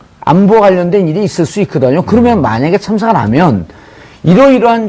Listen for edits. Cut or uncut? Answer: uncut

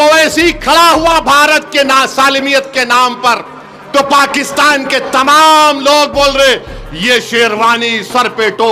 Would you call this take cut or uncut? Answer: uncut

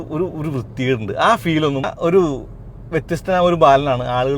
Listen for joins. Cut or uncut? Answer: cut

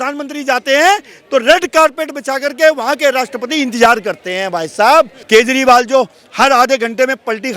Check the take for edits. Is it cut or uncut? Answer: cut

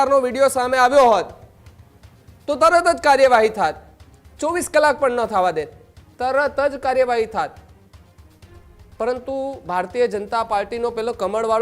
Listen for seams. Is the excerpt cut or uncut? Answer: uncut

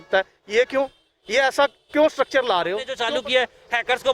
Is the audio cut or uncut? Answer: cut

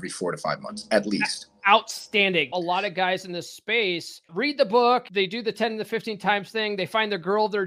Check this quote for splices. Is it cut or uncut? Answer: cut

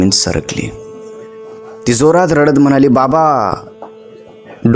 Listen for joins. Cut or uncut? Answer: uncut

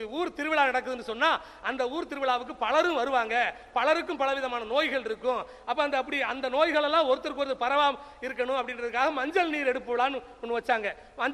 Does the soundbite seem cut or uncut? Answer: uncut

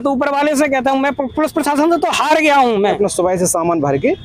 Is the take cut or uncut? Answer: cut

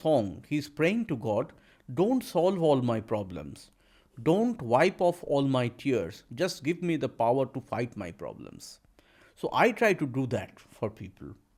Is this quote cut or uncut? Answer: uncut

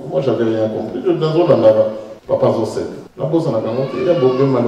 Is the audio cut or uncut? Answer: cut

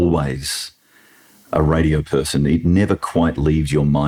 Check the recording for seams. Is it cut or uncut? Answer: uncut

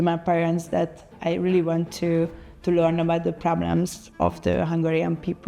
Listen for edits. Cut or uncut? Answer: cut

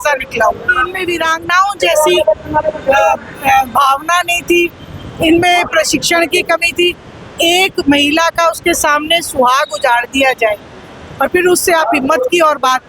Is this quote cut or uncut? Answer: cut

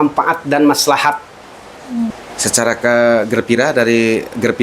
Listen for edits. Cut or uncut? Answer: cut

